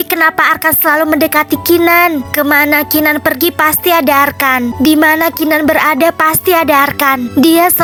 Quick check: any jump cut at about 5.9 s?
no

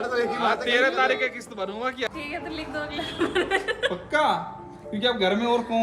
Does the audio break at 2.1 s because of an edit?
yes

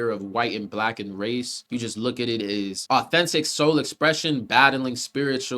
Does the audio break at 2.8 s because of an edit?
yes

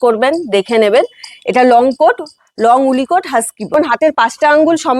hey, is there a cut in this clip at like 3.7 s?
yes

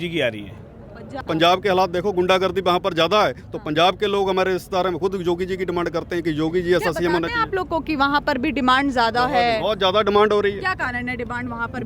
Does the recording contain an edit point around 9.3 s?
no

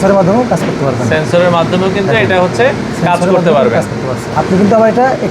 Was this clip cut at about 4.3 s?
yes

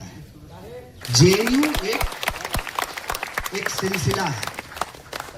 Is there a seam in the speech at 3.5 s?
no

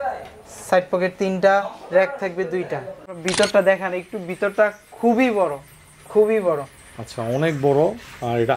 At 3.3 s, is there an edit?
yes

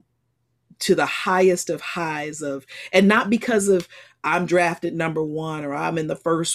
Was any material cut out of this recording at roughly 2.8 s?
no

